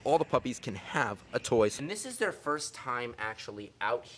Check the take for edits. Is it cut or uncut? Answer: cut